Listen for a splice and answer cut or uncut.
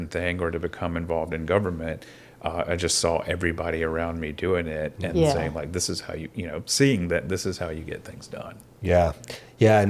uncut